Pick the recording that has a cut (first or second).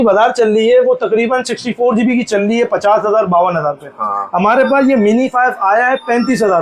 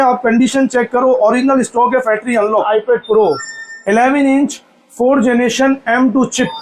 second